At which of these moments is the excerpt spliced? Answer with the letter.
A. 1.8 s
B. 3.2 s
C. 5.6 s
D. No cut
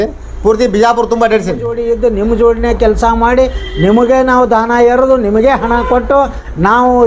A